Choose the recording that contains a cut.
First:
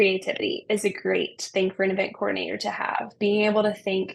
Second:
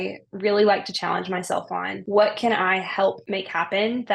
second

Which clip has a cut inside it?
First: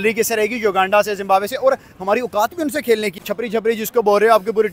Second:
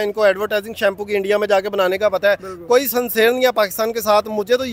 first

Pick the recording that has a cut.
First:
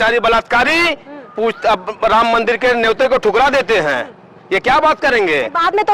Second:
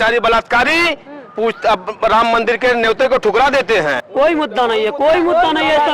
second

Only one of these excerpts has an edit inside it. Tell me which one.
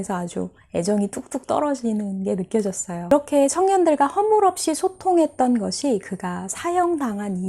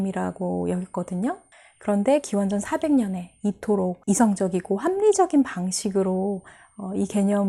first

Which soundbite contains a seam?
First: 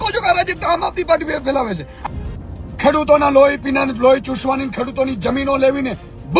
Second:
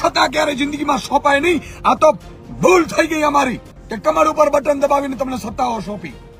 first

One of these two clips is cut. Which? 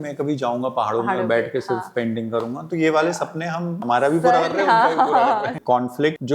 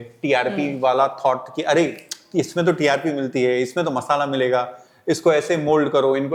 first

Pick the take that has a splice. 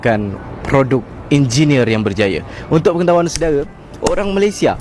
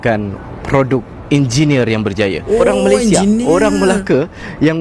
second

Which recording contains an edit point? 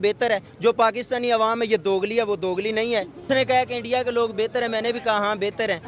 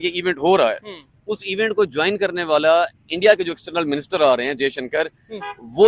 first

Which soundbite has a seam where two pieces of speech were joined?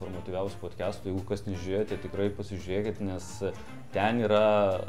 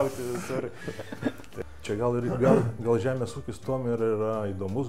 second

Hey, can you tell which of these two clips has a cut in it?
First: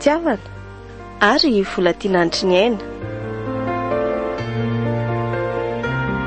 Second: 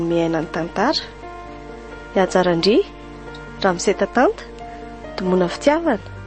first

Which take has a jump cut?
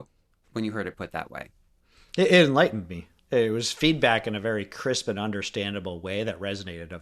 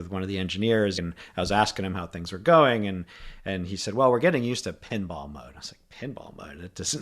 second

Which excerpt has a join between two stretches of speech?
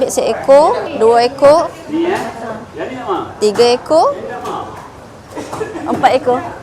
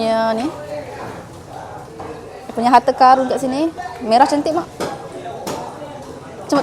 first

